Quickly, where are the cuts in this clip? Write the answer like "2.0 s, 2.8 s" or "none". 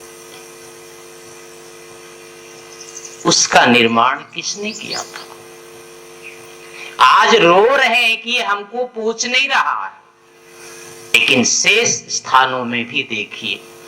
11.1 s